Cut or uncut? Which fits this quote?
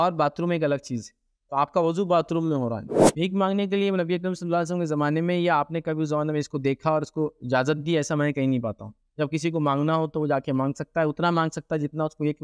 cut